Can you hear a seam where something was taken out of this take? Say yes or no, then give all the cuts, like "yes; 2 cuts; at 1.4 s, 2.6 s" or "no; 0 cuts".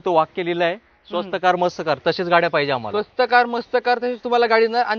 no; 0 cuts